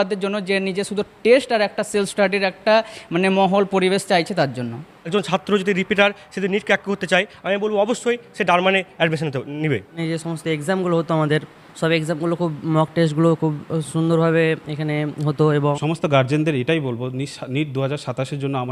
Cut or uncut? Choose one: cut